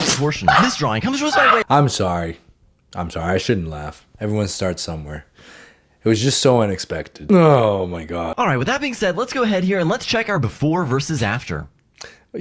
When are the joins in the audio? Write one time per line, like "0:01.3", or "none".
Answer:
none